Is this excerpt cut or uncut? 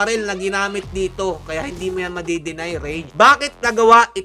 cut